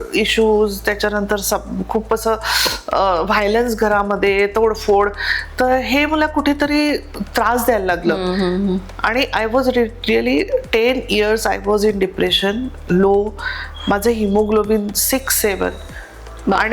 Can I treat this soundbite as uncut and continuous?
yes; 0 cuts

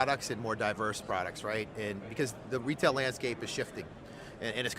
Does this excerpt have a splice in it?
no; 0 cuts

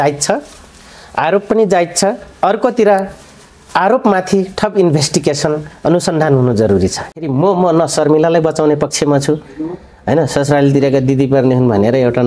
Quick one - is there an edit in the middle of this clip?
yes; 1 cut; at 7.2 s

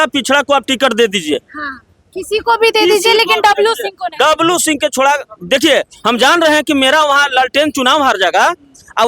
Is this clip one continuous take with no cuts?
yes; 0 cuts

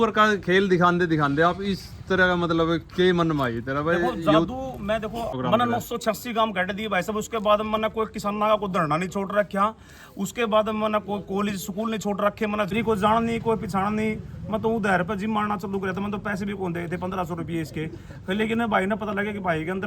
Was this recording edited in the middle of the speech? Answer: yes; 2 cuts; at 5.3 s, 12.7 s

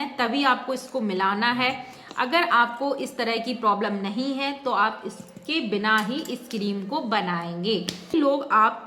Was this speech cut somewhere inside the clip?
no; 0 cuts

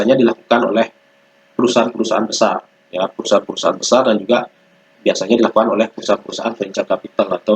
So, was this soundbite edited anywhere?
no; 0 cuts

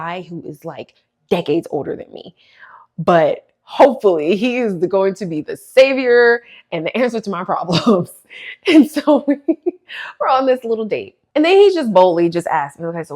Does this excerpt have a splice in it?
yes; 1 cut; at 11.2 s

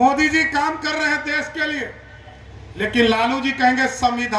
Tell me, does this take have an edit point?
no; 0 cuts

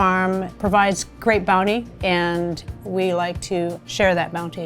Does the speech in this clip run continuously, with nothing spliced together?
no; 2 cuts; at 1.9 s, 2.7 s

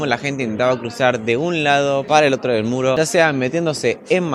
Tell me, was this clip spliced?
yes; 2 cuts; at 2.0 s, 3.0 s

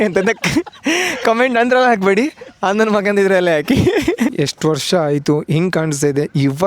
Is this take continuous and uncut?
no; 1 cut; at 4.3 s

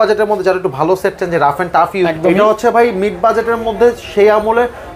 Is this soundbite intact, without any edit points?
no; 1 cut; at 2.1 s

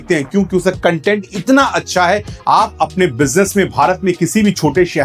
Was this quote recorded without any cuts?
no; 1 cut; at 2.3 s

